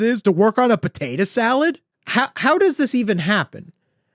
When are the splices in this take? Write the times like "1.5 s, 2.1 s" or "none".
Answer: 1.9 s